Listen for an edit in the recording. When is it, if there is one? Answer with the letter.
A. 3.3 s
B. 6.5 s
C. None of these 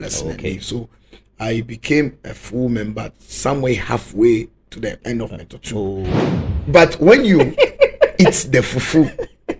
B